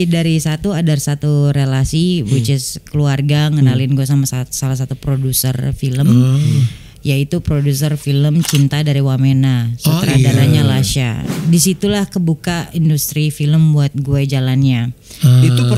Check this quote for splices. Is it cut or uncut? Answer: uncut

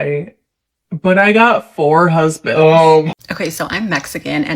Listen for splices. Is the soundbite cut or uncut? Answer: cut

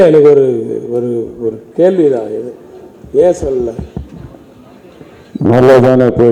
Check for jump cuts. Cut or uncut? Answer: uncut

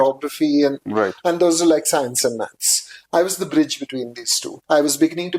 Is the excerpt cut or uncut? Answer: cut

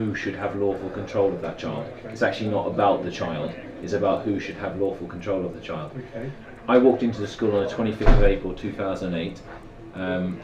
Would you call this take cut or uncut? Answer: uncut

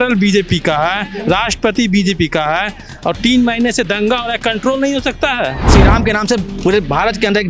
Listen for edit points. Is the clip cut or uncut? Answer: cut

